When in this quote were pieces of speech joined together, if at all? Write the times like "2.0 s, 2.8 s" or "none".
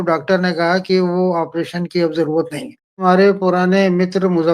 3.2 s